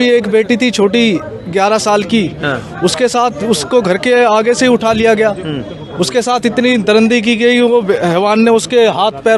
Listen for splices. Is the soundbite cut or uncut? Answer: uncut